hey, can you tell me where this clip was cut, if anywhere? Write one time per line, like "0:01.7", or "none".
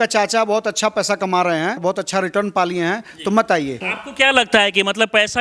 0:01.8
0:03.9